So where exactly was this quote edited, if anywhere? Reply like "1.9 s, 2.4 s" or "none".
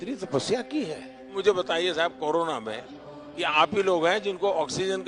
1.4 s